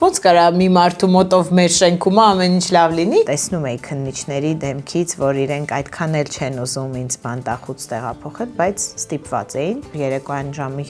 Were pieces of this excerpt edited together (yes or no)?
yes